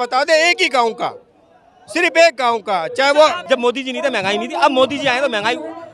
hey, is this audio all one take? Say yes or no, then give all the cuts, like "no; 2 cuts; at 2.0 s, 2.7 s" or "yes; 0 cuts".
no; 1 cut; at 3.4 s